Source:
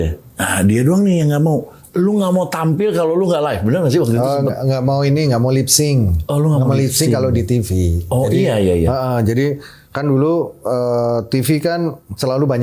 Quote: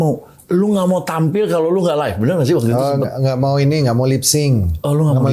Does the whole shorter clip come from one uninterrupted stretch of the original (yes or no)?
yes